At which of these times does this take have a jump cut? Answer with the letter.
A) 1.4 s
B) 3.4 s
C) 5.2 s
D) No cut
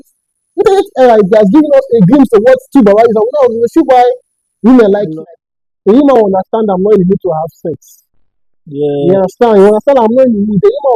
C